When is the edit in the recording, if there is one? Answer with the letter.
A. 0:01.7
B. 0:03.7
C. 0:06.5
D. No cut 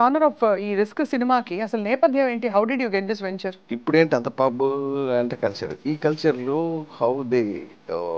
B